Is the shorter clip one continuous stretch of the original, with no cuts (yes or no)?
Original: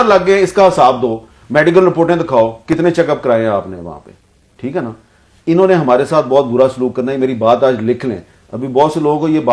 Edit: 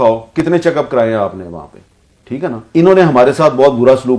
no